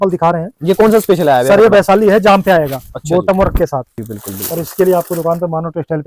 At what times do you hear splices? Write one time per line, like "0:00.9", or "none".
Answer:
0:03.9